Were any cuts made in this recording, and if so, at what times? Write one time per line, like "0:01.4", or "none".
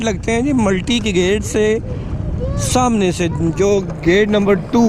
none

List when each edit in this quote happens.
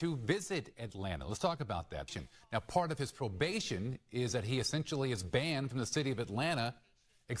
0:02.1

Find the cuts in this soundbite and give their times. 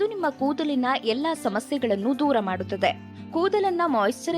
0:03.1

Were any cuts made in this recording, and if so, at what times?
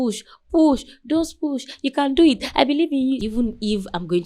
0:03.2

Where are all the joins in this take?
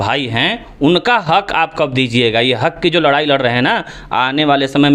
none

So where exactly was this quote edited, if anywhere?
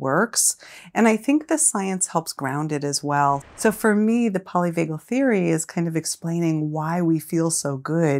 0:03.4

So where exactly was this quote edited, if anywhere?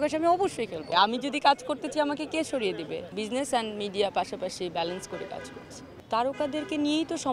0:00.9
0:03.2
0:06.0

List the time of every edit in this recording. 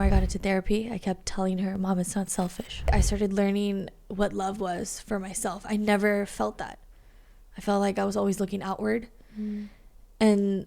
0:02.9

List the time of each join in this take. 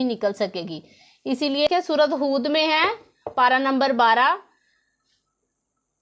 0:01.7

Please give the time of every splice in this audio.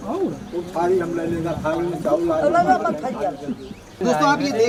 none

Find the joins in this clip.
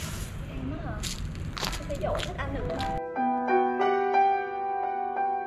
none

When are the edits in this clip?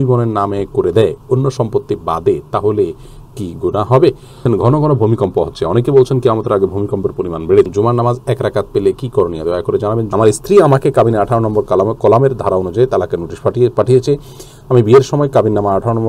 0:04.3
0:07.7
0:10.1

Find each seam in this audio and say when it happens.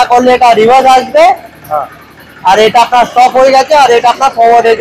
none

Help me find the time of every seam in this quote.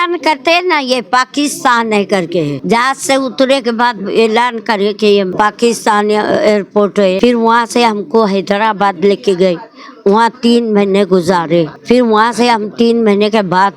0:02.6
0:05.3
0:07.2
0:11.8

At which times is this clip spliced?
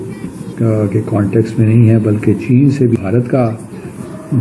0:03.0

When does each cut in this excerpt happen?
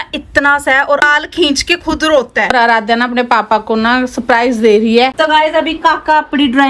0:01.1
0:02.5
0:05.1

